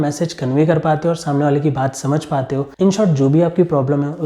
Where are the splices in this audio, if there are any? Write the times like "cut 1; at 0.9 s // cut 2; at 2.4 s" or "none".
cut 1; at 2.7 s